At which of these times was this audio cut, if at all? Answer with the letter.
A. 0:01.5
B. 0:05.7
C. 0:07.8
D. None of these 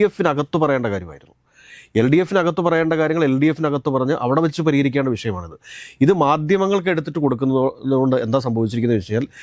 D